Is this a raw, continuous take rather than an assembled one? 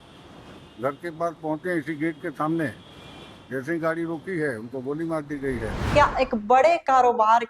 no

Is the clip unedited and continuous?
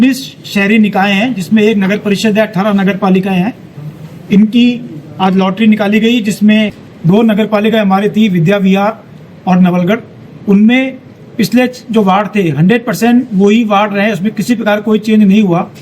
no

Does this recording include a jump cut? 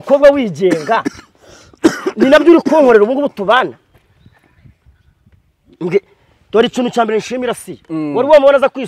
no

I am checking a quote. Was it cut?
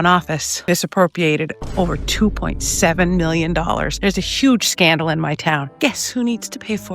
no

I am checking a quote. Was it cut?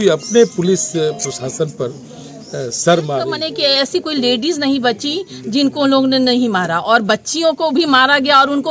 yes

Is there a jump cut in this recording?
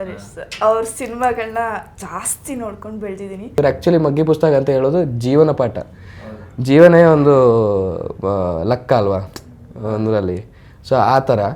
yes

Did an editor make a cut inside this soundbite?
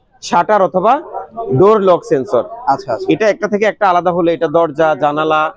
no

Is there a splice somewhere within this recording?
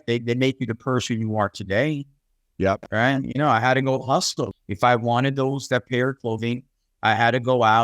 yes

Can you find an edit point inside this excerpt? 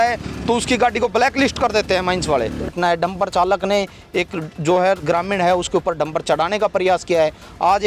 yes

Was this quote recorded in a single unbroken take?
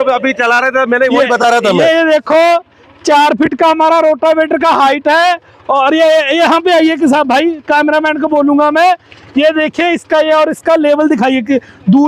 yes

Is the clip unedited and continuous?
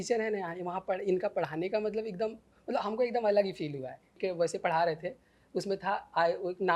no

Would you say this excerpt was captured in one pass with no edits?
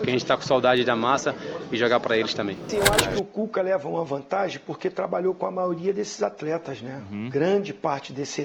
no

